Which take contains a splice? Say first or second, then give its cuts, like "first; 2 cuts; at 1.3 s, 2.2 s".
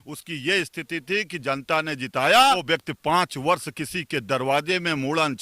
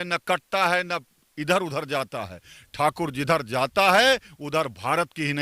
first; 1 cut; at 2.6 s